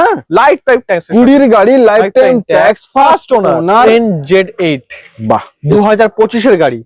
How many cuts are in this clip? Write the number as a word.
one